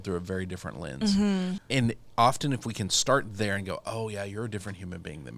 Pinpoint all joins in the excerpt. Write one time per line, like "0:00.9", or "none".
0:01.6